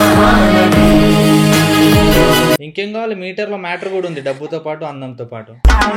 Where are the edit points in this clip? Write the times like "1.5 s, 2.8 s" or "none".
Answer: 2.7 s